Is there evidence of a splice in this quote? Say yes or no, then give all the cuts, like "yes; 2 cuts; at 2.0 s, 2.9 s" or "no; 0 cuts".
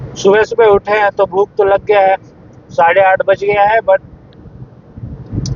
no; 0 cuts